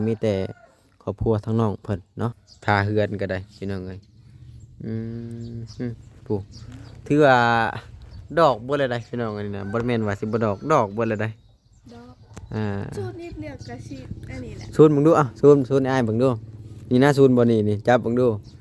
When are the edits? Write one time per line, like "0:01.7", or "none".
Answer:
0:02.5